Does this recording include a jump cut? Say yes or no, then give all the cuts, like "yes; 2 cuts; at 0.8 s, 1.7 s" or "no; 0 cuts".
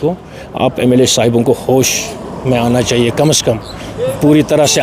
no; 0 cuts